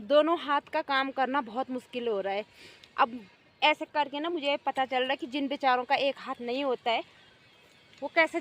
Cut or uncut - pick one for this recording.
uncut